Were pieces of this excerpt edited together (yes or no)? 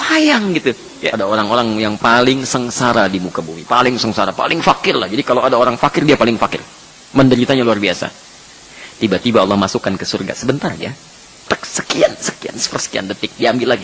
yes